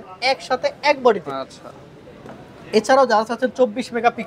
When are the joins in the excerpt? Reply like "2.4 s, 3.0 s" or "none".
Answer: none

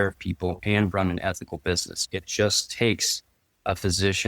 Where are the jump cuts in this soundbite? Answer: 1.9 s

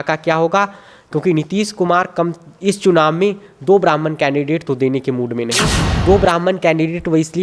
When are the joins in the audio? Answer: 5.9 s

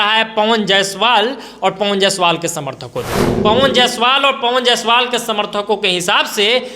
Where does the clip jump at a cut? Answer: 3.2 s

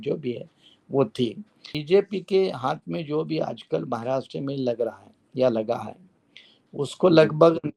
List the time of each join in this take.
1.7 s

